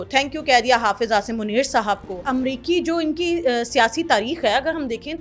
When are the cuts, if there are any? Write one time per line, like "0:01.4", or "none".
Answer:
0:02.2

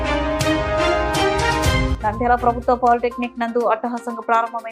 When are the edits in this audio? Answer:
none

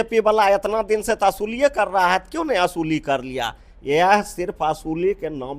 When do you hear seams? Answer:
none

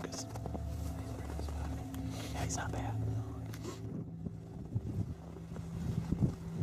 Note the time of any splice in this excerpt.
0:01.5

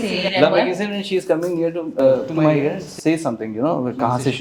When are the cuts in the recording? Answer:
none

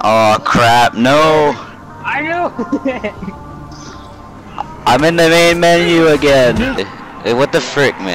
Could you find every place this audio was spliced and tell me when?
0:06.8

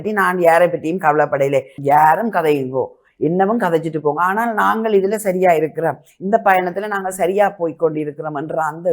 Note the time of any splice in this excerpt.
0:01.7

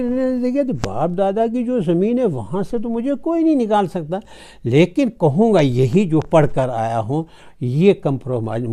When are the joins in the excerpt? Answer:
none

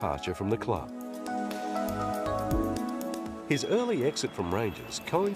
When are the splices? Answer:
0:03.8

